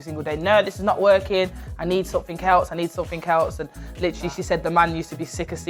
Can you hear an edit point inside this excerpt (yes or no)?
no